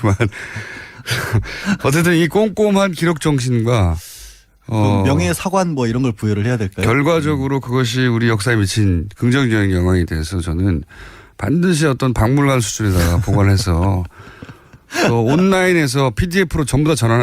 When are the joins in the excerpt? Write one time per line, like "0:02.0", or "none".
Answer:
0:09.7